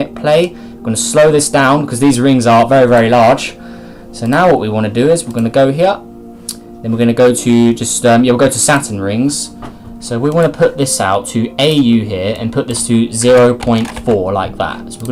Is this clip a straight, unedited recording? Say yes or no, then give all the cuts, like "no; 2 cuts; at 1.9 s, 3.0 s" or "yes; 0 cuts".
yes; 0 cuts